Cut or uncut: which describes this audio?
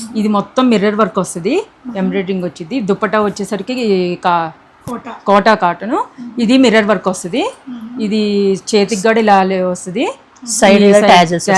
uncut